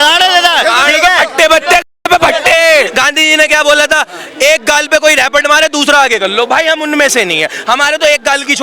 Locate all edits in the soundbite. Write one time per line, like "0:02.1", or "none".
0:02.9

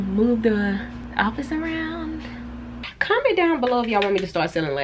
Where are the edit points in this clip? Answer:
0:01.0
0:02.8

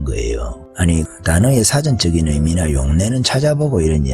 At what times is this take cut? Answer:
0:01.0

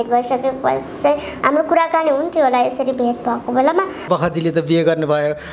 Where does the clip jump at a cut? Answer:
0:04.1

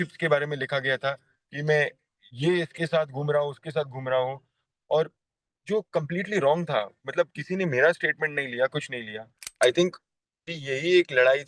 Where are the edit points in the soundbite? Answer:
0:09.5

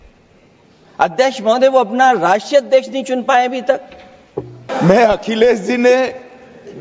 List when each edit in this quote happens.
0:04.6

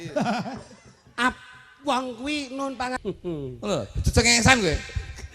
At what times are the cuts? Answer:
0:03.0

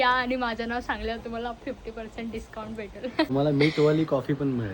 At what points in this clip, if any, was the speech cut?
0:03.3

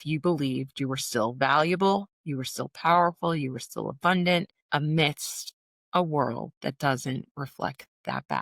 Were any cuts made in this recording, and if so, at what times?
none

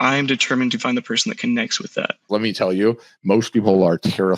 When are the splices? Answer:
0:02.3

